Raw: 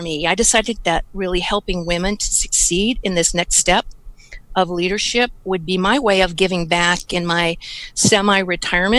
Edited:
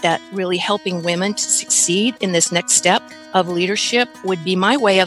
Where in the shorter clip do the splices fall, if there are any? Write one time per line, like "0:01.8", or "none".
0:03.2